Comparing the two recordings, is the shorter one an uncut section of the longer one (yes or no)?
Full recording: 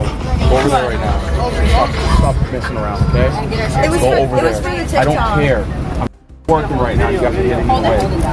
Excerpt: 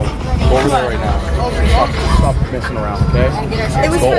yes